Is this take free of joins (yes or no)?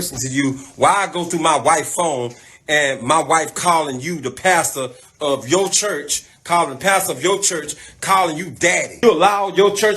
no